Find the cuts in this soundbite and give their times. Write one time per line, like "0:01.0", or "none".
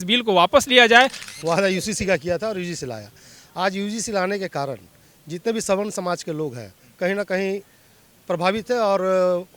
0:01.2